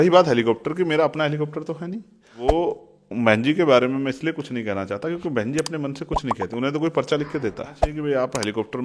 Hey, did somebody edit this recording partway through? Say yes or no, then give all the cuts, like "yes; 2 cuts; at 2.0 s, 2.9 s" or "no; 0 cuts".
yes; 2 cuts; at 2.5 s, 7.9 s